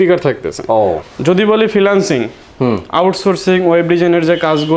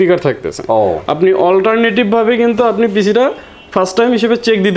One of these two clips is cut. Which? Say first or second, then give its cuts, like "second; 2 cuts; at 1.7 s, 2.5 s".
first; 1 cut; at 1.0 s